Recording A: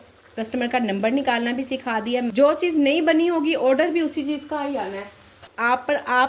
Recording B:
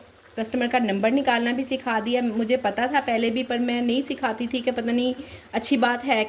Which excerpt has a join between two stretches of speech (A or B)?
A